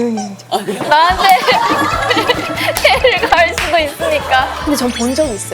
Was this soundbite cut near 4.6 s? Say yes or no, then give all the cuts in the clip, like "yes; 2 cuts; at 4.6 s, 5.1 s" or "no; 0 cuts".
yes; 1 cut; at 4.6 s